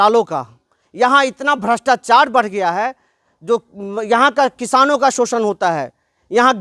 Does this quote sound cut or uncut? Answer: uncut